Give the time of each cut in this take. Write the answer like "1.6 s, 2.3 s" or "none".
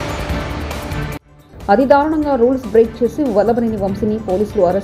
none